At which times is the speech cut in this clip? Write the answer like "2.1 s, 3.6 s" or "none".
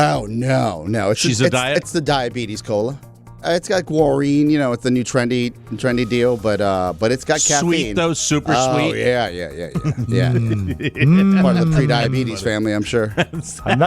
3.4 s